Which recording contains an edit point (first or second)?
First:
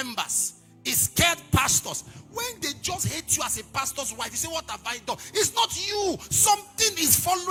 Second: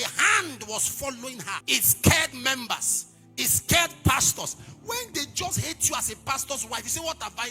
second